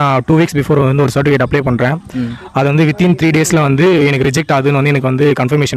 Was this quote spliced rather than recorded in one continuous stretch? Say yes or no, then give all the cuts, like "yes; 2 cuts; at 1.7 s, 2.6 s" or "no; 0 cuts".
no; 0 cuts